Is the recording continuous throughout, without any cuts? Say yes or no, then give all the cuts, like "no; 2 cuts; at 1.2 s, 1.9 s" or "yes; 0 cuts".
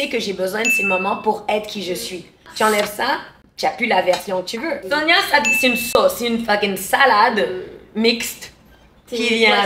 no; 2 cuts; at 2.5 s, 4.8 s